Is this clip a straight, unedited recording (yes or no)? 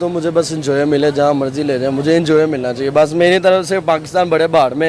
yes